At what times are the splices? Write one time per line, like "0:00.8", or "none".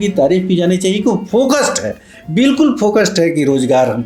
none